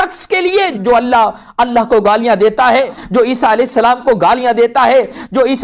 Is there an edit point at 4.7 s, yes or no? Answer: no